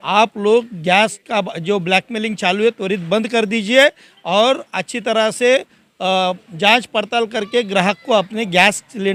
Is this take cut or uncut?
uncut